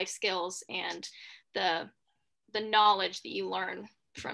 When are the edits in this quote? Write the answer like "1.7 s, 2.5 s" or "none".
none